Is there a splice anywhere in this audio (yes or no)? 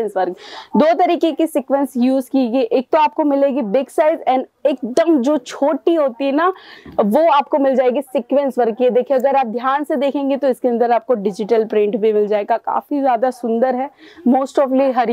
no